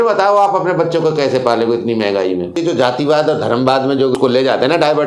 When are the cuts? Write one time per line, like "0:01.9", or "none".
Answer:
0:02.6
0:04.1